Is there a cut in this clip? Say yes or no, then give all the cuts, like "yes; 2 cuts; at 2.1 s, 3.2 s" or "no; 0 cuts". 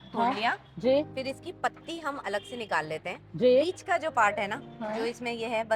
no; 0 cuts